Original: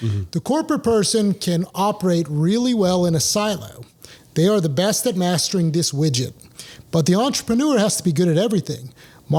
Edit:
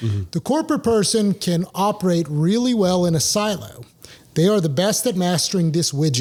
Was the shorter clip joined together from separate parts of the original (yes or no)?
no